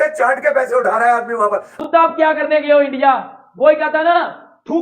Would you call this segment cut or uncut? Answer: cut